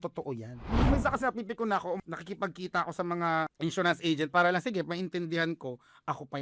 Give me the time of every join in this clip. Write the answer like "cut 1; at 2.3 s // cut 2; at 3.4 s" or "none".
cut 1; at 0.9 s // cut 2; at 2.0 s // cut 3; at 3.5 s